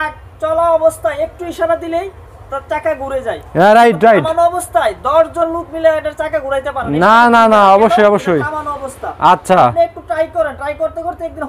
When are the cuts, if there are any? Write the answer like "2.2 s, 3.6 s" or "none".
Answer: none